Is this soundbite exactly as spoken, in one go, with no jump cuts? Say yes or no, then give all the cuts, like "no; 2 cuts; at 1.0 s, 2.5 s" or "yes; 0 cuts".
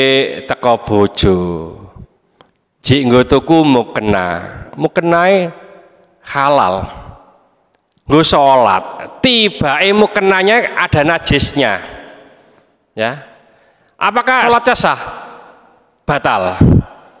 no; 1 cut; at 14.4 s